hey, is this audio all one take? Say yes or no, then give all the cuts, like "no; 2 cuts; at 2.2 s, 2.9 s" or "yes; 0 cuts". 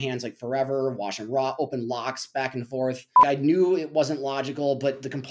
no; 1 cut; at 3.2 s